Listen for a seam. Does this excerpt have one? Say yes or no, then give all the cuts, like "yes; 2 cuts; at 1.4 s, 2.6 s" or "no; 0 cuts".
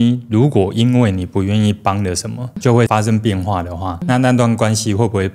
yes; 1 cut; at 4.0 s